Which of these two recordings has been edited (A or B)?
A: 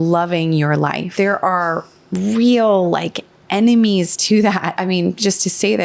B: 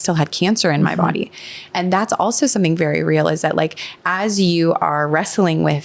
A